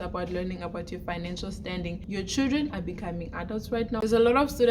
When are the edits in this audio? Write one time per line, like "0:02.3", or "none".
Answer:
0:02.0
0:04.0